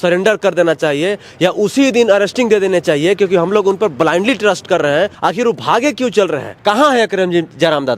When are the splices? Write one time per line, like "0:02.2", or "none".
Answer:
0:05.1
0:06.5